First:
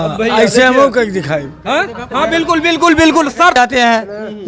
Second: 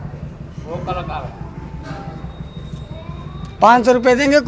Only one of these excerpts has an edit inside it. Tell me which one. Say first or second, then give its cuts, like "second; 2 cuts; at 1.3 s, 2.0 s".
first; 1 cut; at 3.5 s